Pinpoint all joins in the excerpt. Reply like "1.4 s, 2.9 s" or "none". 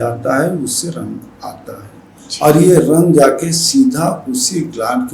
none